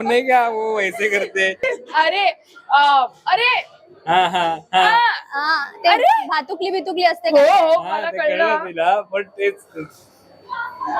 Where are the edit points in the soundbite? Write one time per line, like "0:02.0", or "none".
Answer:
0:01.6